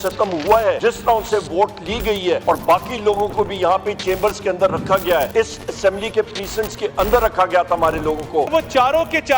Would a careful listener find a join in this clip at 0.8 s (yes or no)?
yes